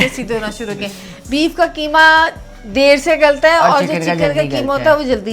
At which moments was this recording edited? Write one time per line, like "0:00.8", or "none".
none